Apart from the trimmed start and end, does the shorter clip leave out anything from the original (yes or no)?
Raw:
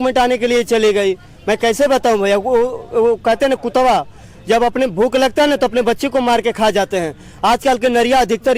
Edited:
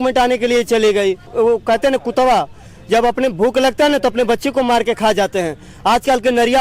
yes